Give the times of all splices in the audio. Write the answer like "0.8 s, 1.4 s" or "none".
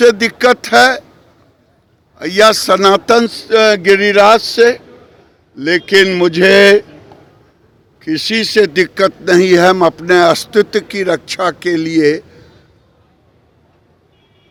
none